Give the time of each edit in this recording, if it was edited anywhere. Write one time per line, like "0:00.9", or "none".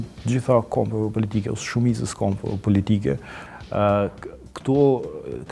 0:03.4